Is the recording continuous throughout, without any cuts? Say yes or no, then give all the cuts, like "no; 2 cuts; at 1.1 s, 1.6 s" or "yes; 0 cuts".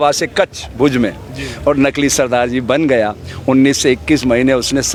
yes; 0 cuts